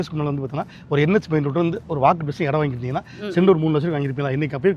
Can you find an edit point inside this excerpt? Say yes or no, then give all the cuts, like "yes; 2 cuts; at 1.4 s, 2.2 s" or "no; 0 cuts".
no; 0 cuts